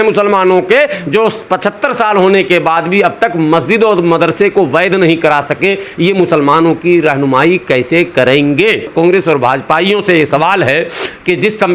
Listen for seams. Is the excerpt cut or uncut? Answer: cut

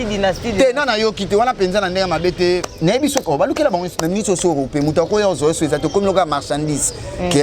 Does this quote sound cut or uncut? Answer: cut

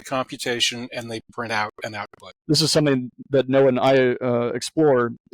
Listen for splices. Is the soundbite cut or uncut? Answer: cut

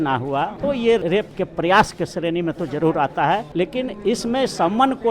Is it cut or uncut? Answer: cut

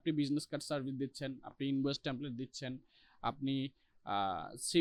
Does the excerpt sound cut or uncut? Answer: uncut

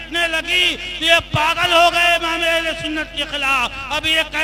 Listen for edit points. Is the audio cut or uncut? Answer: uncut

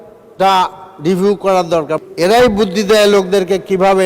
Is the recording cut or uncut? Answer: cut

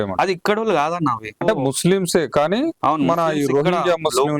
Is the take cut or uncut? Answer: cut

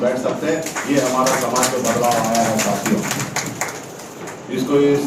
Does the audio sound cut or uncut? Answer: uncut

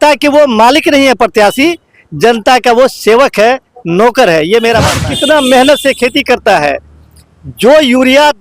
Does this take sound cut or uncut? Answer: cut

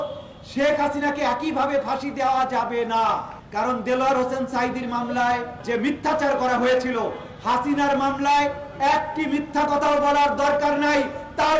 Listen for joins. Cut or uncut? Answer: cut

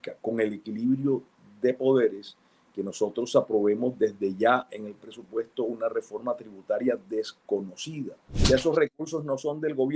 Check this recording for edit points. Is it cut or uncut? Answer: cut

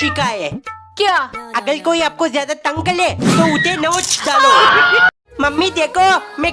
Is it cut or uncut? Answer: cut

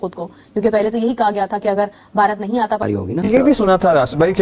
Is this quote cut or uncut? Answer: cut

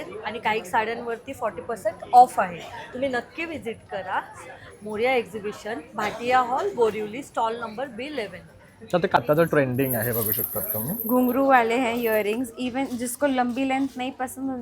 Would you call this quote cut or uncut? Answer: cut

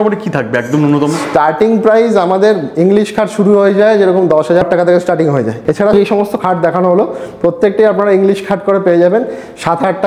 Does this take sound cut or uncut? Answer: cut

